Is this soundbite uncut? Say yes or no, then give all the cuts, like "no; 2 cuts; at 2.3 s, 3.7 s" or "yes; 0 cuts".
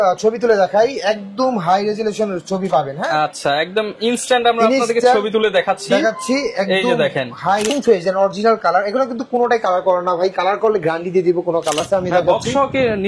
no; 2 cuts; at 7.7 s, 11.8 s